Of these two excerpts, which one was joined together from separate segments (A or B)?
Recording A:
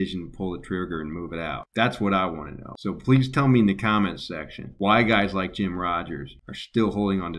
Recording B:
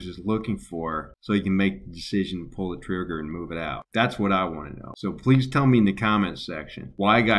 B